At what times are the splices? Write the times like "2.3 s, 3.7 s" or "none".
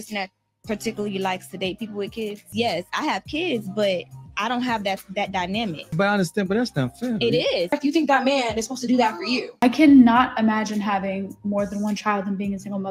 2.5 s, 5.9 s, 7.7 s, 9.5 s